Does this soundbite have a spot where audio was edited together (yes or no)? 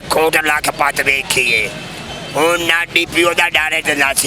no